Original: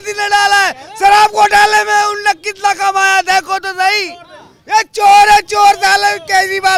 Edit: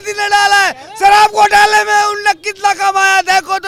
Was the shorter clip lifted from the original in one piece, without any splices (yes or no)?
yes